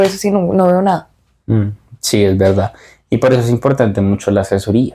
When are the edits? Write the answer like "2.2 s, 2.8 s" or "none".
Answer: none